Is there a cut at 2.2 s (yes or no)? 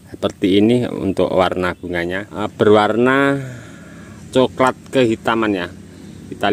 yes